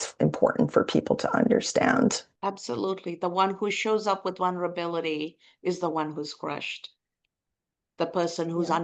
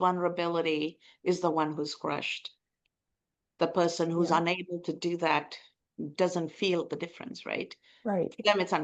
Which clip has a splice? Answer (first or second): first